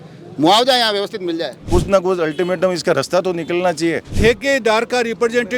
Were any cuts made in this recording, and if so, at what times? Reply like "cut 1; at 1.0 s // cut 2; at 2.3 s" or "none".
cut 1; at 1.6 s // cut 2; at 4.1 s